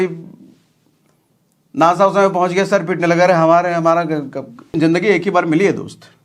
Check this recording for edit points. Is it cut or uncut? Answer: cut